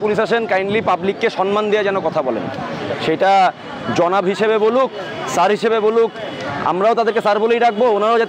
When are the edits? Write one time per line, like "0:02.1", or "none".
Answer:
none